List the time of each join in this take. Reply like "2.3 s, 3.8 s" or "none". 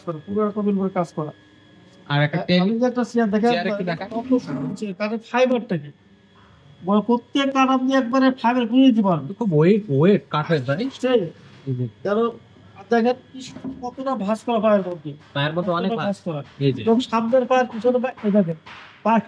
none